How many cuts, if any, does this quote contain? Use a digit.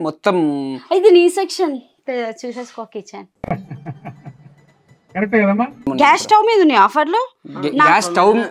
1